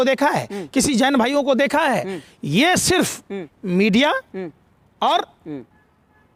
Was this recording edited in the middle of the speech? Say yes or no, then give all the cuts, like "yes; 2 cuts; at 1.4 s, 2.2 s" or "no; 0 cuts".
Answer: no; 0 cuts